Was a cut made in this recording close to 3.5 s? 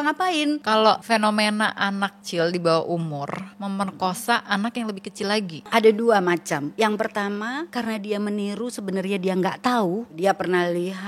yes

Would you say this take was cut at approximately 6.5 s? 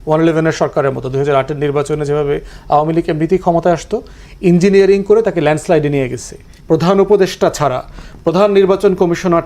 yes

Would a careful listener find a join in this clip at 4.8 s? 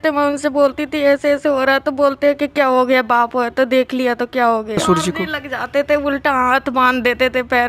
yes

